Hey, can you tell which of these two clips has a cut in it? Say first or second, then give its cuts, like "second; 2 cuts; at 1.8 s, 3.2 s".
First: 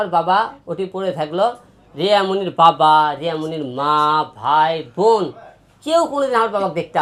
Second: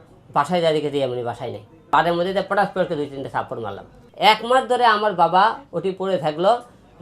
second; 2 cuts; at 1.8 s, 4.0 s